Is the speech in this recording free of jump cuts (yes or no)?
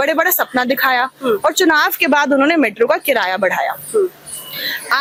yes